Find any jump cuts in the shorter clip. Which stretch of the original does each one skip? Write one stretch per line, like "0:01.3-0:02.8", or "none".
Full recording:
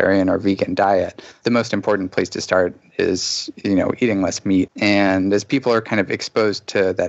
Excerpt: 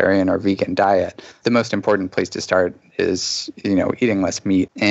none